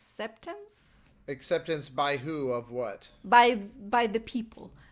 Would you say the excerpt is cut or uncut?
cut